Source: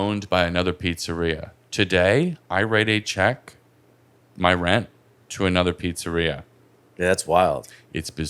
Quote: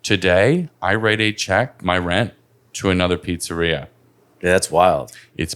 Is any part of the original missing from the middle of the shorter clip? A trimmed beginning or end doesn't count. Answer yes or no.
yes